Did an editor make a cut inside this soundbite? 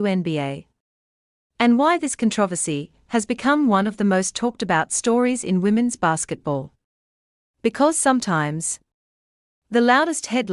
yes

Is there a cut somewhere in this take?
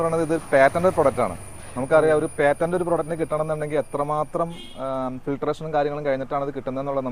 no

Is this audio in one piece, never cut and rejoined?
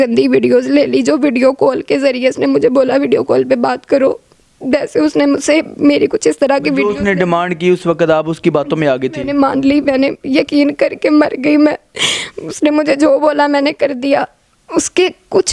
yes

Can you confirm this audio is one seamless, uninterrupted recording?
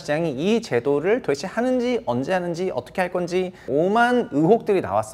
no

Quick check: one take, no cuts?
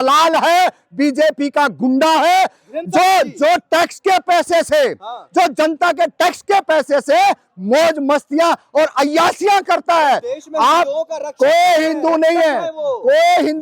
yes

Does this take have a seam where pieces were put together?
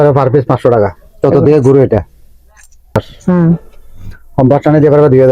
yes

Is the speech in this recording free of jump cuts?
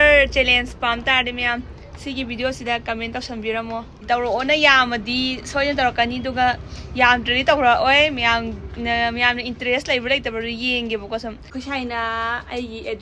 no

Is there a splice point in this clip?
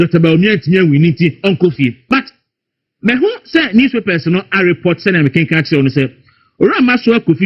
yes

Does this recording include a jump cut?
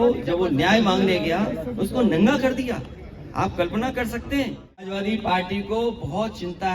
yes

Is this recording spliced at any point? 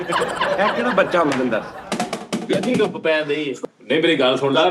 yes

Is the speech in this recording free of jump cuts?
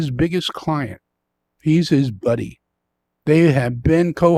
yes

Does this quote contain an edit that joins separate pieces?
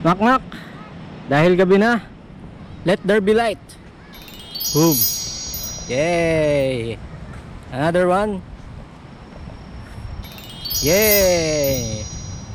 no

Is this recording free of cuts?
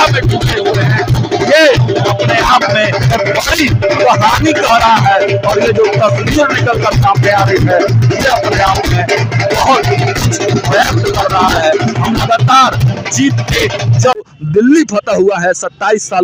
yes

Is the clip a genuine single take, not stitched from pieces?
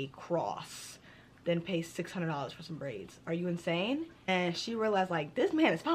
no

